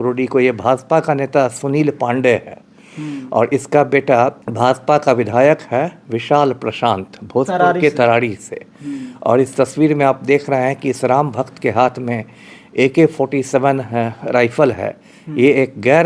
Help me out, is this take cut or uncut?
cut